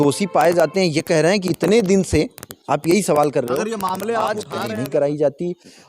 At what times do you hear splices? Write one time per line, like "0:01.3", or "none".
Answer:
0:04.5